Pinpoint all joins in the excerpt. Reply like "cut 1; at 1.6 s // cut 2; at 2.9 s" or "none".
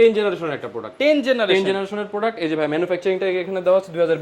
none